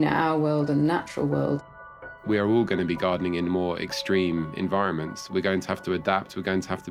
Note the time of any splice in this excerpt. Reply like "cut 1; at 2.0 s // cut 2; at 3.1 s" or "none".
cut 1; at 1.7 s